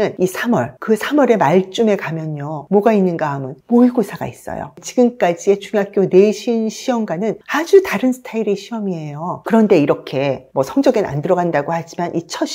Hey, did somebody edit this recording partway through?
yes; 1 cut; at 9.4 s

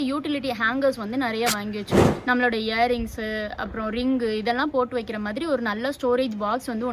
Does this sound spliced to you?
yes; 1 cut; at 1.9 s

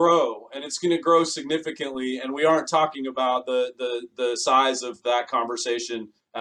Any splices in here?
no; 0 cuts

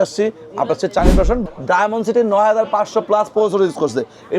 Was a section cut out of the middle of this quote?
yes; 1 cut; at 1.4 s

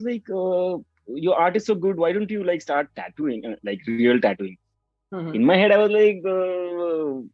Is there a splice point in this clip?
no; 0 cuts

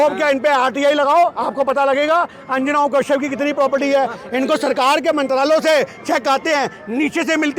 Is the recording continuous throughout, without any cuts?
yes; 0 cuts

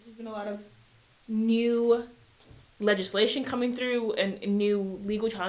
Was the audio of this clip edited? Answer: no; 0 cuts

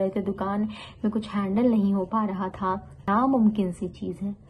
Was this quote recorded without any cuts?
no; 1 cut; at 3.1 s

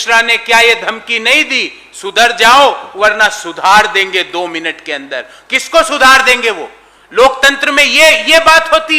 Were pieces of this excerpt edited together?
no; 0 cuts

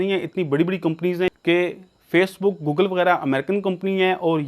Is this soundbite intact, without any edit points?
no; 1 cut; at 1.3 s

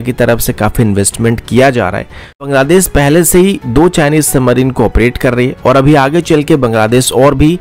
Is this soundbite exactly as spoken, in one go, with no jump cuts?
no; 1 cut; at 2.4 s

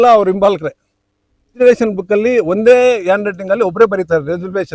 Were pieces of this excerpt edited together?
yes; 1 cut; at 1.6 s

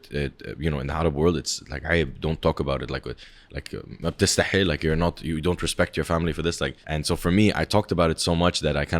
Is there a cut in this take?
yes; 1 cut; at 6.8 s

